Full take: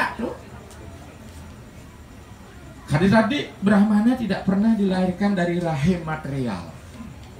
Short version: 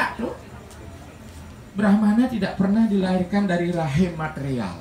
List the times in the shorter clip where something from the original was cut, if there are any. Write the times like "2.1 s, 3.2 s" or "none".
1.7 s